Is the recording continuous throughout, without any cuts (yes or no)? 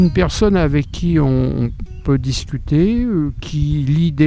yes